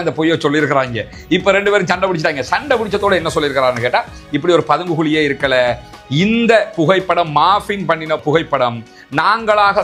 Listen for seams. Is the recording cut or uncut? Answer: uncut